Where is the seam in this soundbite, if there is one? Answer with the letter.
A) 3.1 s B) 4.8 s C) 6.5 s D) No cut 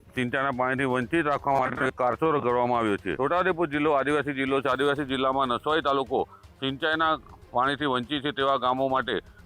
A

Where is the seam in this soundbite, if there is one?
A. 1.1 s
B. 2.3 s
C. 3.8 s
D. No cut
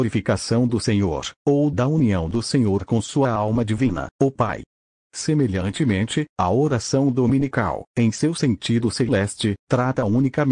A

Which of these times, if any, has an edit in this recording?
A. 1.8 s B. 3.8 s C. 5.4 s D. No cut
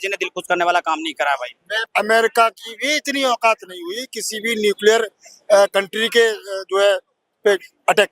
A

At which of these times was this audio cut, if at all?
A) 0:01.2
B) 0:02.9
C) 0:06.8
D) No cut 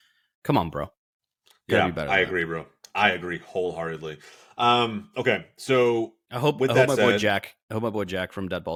D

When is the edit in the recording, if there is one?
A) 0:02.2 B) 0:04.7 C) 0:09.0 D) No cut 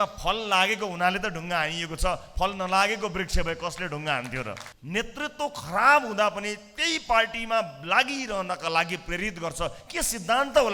B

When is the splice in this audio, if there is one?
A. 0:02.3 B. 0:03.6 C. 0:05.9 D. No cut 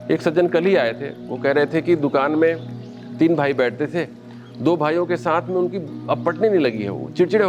D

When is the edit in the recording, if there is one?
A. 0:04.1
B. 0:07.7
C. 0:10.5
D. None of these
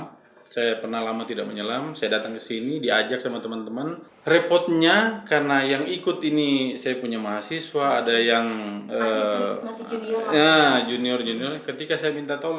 A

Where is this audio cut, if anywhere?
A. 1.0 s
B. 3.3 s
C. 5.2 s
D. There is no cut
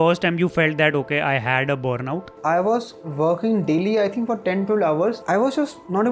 C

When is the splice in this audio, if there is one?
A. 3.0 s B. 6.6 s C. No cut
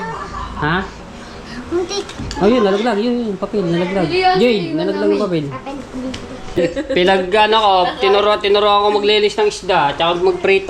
B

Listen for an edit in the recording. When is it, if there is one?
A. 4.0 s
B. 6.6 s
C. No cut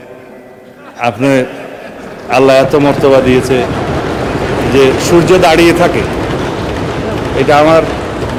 C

